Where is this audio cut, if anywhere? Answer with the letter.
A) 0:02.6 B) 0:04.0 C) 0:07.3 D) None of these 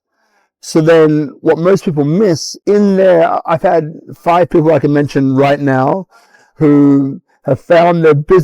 A